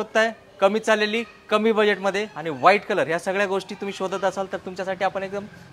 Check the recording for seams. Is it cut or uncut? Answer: uncut